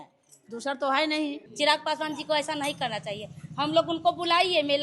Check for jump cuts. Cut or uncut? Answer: cut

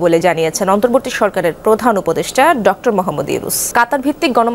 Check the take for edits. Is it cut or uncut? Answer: cut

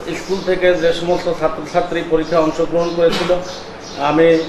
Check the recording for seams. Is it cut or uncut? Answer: uncut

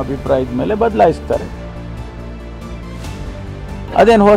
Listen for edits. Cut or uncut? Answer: cut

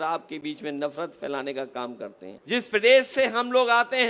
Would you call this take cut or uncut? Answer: cut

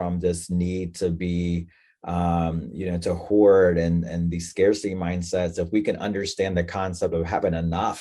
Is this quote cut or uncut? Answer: uncut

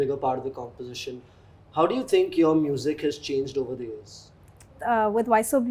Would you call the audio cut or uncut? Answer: cut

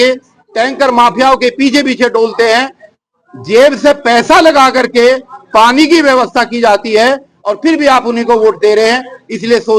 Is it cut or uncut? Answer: uncut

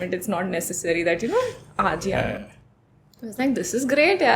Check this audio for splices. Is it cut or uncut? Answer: uncut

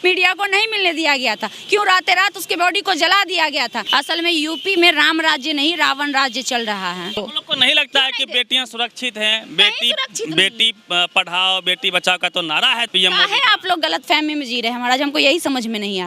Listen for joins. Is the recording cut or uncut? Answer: cut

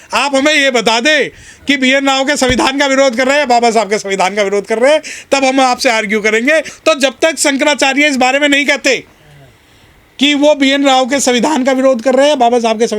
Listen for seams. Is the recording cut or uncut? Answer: cut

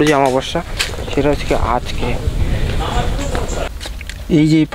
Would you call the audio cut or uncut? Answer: uncut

